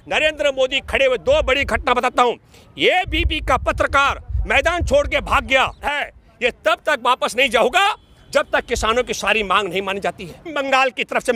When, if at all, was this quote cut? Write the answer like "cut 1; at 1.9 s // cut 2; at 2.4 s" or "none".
cut 1; at 5.9 s // cut 2; at 10.5 s